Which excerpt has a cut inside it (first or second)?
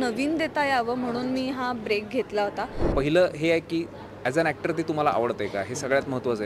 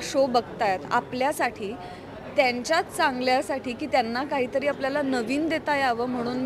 first